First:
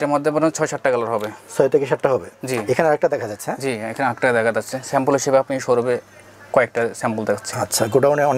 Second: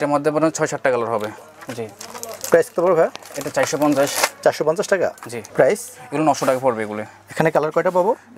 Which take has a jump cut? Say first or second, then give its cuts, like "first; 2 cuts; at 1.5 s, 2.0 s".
second; 2 cuts; at 1.4 s, 5.3 s